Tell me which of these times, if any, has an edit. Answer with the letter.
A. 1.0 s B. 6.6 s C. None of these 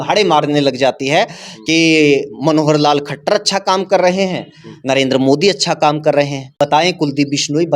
B